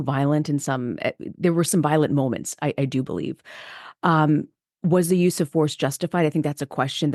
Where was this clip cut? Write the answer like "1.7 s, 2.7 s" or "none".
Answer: none